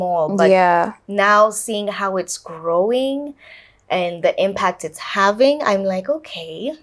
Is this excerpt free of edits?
yes; 0 cuts

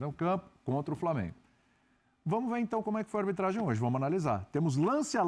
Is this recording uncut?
yes; 0 cuts

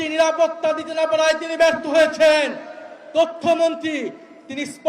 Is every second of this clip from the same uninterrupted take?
yes; 0 cuts

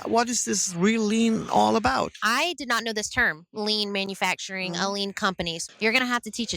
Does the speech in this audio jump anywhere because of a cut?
yes; 2 cuts; at 2.2 s, 5.6 s

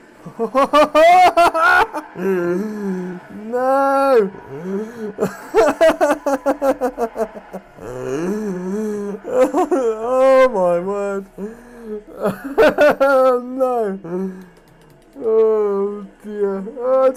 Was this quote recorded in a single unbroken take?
yes; 0 cuts

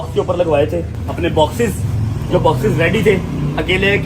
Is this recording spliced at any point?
yes; 1 cut; at 1.0 s

